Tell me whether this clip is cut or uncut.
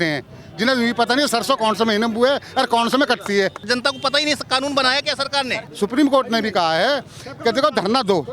cut